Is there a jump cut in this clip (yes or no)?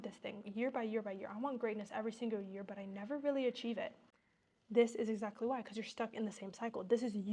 no